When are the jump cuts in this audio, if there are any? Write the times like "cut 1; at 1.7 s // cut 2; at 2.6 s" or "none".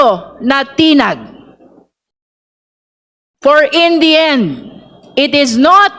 none